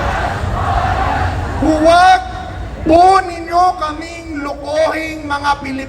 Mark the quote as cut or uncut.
cut